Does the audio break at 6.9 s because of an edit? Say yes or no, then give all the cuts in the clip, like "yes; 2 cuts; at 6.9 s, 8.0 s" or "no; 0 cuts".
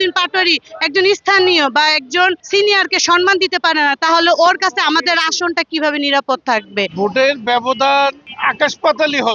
yes; 1 cut; at 6.9 s